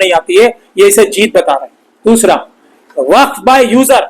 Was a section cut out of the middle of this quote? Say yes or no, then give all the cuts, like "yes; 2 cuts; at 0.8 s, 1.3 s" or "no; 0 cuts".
no; 0 cuts